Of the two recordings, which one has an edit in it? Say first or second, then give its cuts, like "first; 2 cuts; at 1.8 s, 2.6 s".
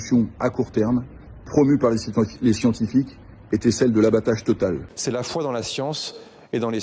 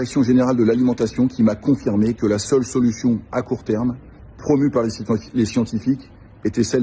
first; 1 cut; at 4.9 s